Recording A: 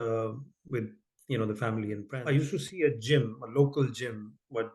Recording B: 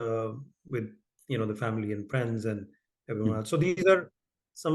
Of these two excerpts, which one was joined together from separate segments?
A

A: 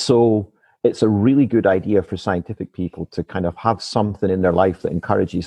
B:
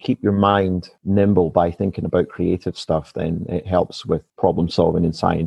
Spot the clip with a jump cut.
B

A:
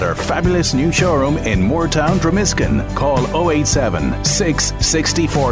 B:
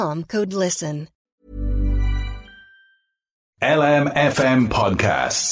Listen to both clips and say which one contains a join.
B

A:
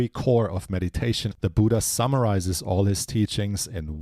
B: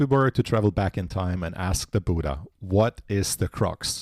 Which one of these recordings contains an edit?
A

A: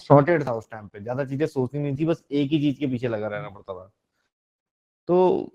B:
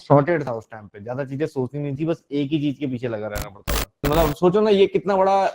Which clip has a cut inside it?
B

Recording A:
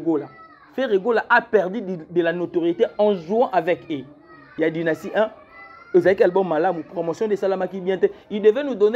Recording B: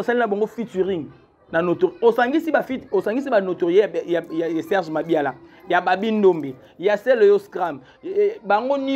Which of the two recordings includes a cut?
A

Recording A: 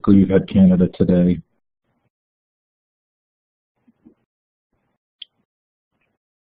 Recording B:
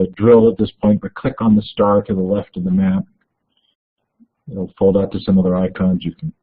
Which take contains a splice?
B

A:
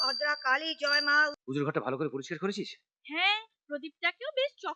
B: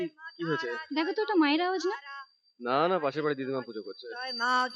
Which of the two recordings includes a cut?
A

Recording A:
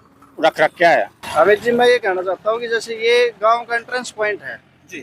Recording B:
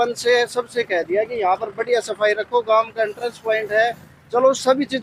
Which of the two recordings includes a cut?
A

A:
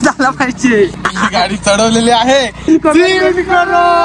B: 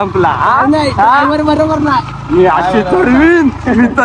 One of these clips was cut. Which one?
A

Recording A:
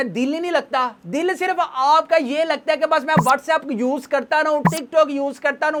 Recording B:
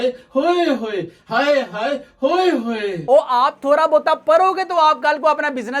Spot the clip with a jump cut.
B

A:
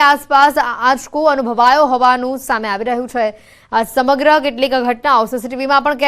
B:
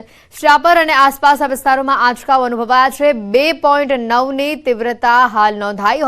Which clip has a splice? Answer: A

